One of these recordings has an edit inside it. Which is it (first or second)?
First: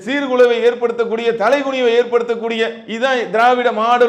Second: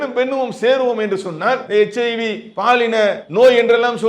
second